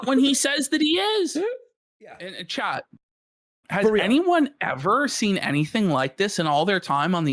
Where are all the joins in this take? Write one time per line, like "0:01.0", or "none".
0:02.3